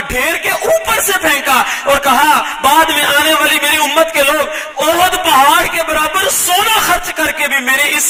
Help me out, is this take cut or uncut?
uncut